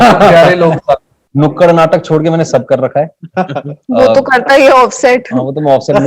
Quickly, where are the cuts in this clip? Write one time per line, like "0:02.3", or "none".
0:01.2